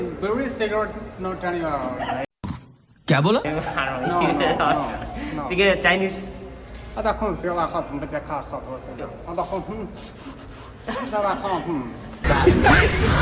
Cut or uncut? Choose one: uncut